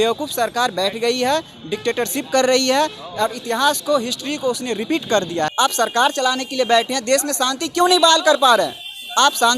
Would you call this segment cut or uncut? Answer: cut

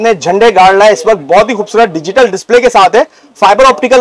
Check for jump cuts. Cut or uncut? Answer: uncut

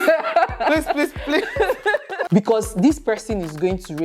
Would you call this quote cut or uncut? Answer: cut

